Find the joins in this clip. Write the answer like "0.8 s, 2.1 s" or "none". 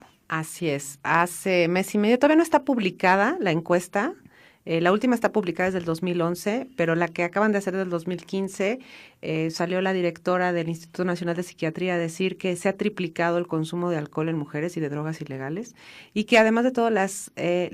8.9 s